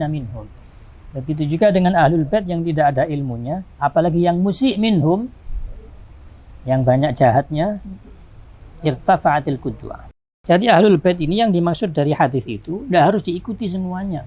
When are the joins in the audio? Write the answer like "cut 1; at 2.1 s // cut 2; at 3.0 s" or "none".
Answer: cut 1; at 10.1 s